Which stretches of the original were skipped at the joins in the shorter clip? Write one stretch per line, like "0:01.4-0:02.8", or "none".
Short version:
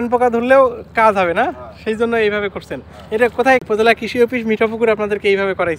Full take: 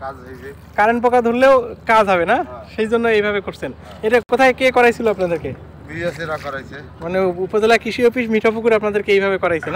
0:04.3-0:07.2